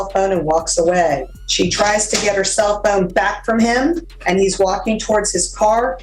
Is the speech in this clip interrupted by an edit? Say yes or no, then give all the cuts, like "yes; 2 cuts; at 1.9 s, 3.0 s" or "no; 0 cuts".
yes; 2 cuts; at 1.4 s, 4.1 s